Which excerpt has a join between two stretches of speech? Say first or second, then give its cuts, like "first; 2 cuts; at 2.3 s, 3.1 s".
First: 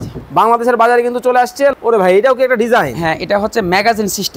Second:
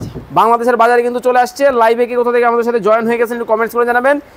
first; 1 cut; at 1.7 s